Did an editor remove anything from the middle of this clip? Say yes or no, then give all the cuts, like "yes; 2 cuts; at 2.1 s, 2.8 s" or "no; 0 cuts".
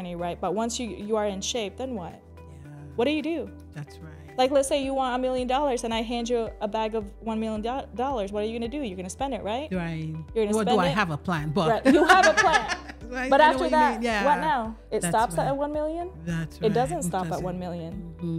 no; 0 cuts